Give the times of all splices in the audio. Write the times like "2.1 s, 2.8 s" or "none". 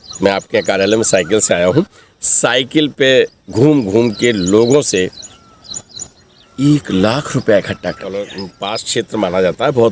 8.0 s

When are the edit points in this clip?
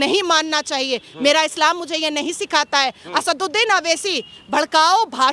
none

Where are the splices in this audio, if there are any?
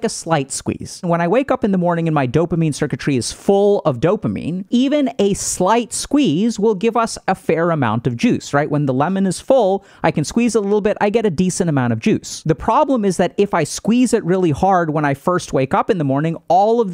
1.1 s, 4.5 s, 12.3 s

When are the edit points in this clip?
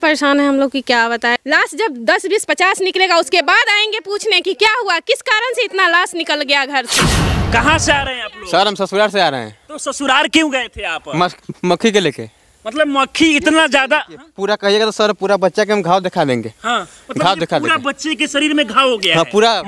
1.4 s, 7.4 s

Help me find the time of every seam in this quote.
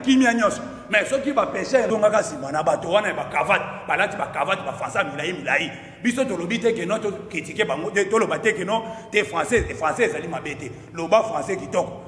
1.9 s

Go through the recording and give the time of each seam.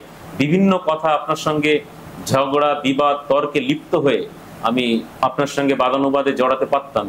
5.2 s

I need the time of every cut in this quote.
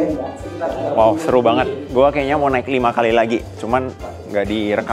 none

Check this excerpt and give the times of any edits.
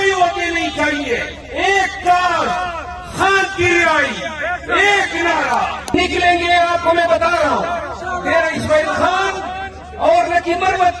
5.9 s

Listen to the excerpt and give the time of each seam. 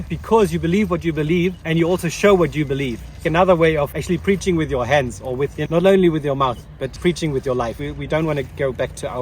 1.6 s, 3.2 s, 4.0 s, 5.6 s, 6.9 s, 7.9 s

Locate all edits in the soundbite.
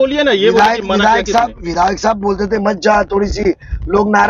none

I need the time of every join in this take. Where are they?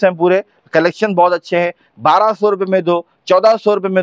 none

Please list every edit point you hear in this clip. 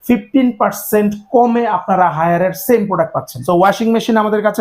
3.4 s

